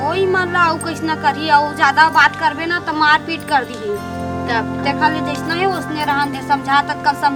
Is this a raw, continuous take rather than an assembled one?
yes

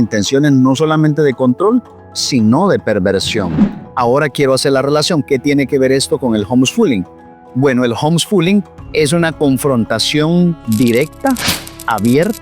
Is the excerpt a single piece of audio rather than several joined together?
no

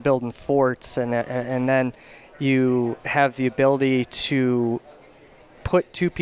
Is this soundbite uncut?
yes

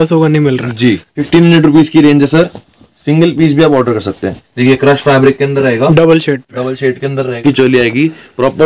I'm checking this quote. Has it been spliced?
yes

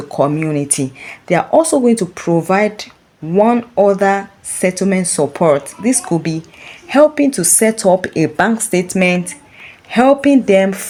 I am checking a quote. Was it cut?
no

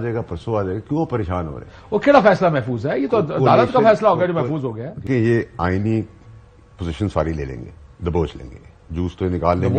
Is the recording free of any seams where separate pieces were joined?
no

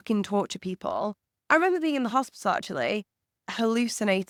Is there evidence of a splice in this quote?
no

